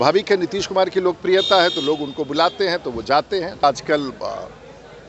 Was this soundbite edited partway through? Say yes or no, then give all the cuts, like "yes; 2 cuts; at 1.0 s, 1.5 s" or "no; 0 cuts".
yes; 1 cut; at 3.6 s